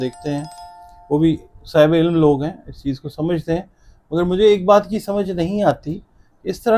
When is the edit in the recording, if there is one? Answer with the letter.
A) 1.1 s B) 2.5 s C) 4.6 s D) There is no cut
D